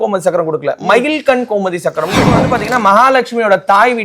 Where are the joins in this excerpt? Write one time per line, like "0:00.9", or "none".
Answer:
0:02.5

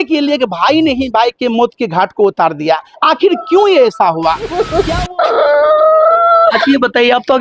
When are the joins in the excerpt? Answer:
0:04.7

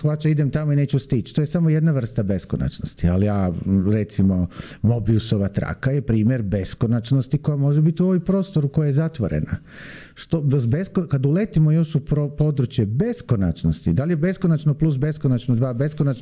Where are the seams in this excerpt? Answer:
none

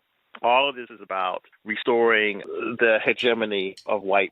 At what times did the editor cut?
none

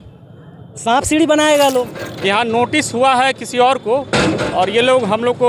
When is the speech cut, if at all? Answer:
0:02.0

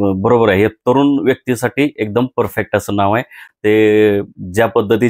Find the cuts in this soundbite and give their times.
none

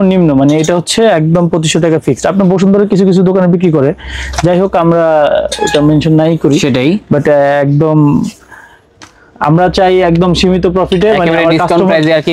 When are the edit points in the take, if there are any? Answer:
none

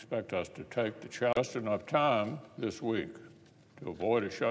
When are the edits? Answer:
none

